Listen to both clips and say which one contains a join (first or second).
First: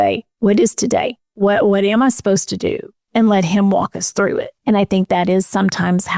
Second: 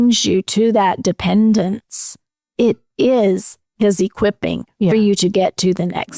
first